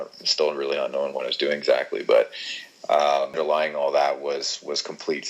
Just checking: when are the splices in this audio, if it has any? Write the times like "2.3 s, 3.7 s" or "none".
3.4 s

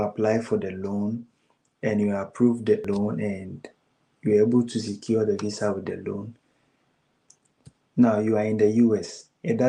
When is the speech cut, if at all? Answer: 2.9 s

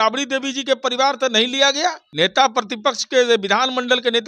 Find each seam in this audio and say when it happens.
2.0 s

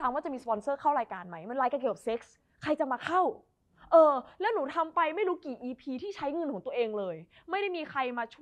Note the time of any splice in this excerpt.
none

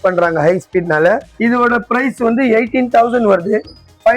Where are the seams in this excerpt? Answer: 1.3 s

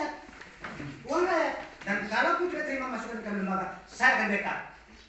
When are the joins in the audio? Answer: none

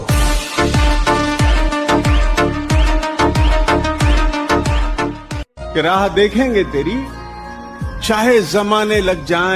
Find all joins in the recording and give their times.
5.4 s

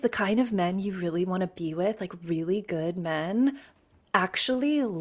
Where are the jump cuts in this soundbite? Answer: none

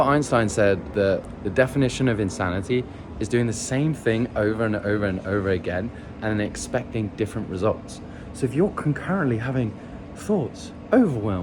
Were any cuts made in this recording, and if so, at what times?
0.9 s

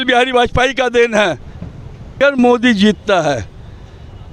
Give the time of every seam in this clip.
2.2 s

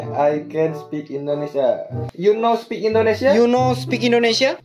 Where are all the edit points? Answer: 1.9 s

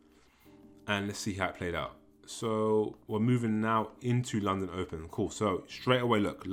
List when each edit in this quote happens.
none

